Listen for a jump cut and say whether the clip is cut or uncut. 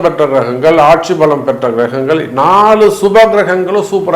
uncut